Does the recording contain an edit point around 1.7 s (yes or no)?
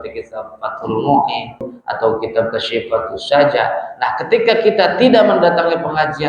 yes